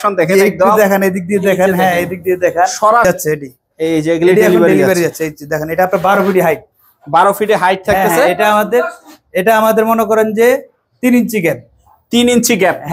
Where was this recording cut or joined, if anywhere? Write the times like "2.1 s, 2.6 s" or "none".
3.0 s